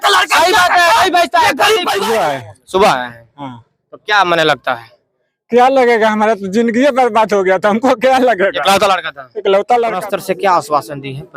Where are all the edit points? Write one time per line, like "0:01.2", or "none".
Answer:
0:02.0
0:10.0